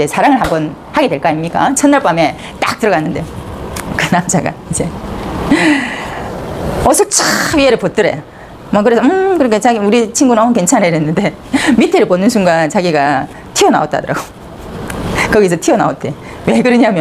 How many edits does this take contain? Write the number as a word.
zero